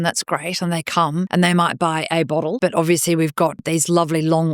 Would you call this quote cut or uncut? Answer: cut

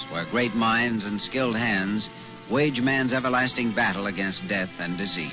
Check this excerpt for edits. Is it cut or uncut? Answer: cut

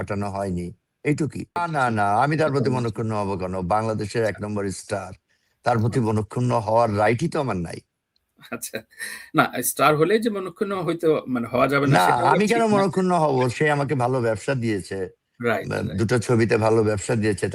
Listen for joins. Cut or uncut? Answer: cut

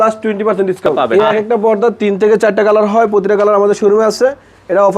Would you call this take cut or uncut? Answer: cut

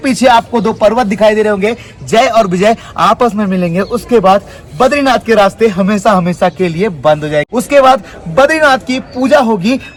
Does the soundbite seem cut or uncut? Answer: uncut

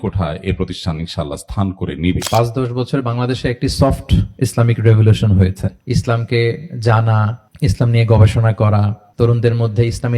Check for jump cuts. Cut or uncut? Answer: cut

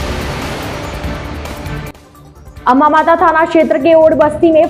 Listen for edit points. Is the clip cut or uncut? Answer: cut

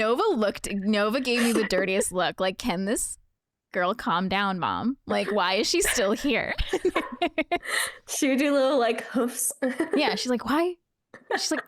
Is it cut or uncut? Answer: uncut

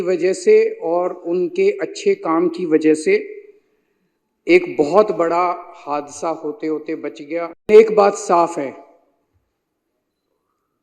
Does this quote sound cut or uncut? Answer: cut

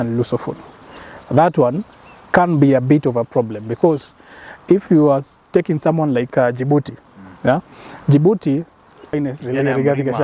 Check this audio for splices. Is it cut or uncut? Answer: cut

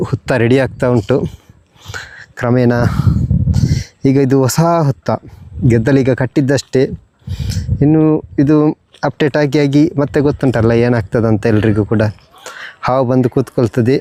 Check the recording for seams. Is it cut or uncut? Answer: uncut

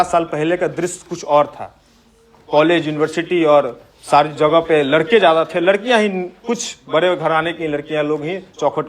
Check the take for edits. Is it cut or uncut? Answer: uncut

